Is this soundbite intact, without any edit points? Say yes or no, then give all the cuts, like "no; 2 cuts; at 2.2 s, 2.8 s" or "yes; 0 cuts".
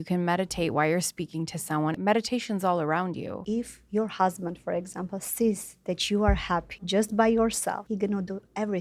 no; 4 cuts; at 2.0 s, 3.4 s, 6.9 s, 7.8 s